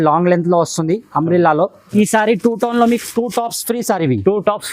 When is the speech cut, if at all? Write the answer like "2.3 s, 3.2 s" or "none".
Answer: 1.9 s